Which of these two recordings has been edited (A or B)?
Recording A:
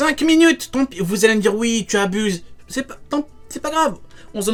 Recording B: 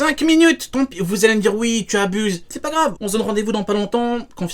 B